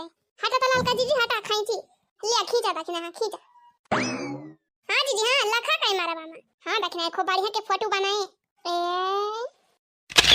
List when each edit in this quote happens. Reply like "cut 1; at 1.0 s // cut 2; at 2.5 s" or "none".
none